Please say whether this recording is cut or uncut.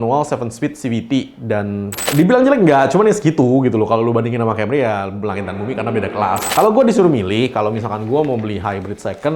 cut